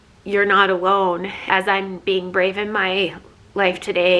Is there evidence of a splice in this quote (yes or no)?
yes